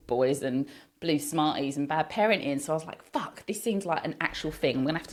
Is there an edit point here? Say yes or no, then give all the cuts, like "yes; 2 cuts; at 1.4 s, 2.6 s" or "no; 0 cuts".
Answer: no; 0 cuts